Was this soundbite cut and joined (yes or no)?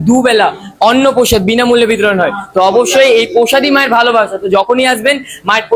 no